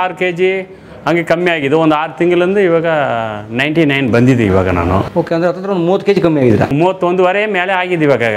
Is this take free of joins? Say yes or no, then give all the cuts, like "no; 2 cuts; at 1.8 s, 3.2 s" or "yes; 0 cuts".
yes; 0 cuts